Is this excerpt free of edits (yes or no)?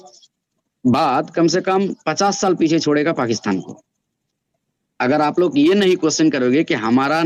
yes